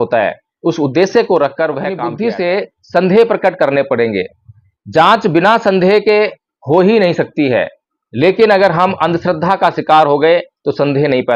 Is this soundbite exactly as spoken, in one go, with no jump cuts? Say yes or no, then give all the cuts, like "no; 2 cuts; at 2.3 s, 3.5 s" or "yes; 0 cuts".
no; 1 cut; at 2.1 s